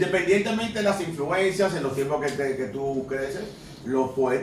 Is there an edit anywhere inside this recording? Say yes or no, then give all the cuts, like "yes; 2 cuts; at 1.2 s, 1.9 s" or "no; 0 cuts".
no; 0 cuts